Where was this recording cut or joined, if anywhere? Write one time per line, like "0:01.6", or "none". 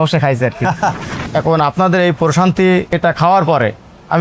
0:01.1